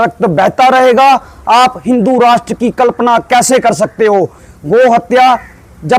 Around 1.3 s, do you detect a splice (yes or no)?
no